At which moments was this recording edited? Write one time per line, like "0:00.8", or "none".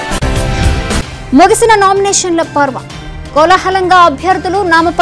none